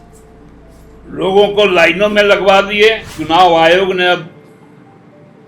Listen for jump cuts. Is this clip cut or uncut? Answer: cut